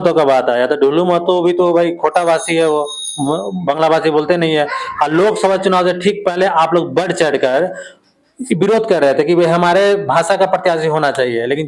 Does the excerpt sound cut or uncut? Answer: uncut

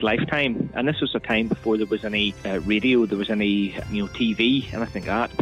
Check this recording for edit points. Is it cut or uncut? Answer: cut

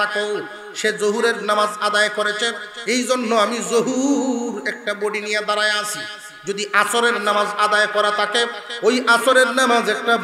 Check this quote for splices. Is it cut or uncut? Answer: uncut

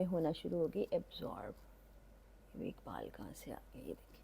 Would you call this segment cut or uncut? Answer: uncut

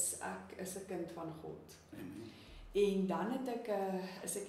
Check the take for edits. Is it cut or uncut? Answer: uncut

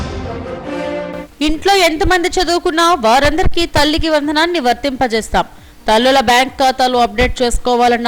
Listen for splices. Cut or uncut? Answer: cut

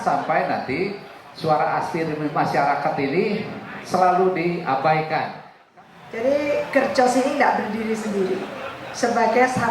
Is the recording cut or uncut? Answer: cut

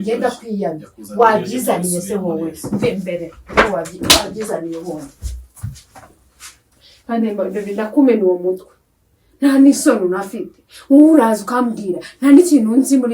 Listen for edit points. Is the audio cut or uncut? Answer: uncut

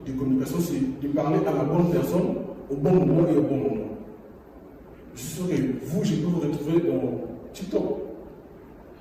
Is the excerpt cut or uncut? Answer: uncut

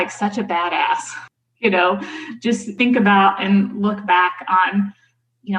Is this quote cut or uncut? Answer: cut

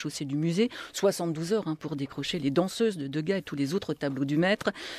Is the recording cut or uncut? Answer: cut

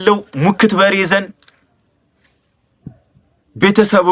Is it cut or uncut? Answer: uncut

